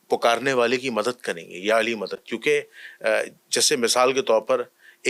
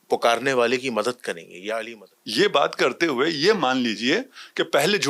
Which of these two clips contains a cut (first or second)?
second